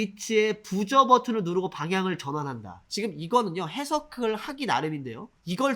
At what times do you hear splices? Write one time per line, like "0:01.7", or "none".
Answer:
none